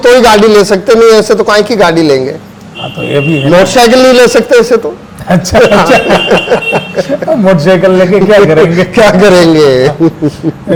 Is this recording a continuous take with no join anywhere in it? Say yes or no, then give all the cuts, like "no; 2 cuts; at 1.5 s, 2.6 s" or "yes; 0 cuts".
yes; 0 cuts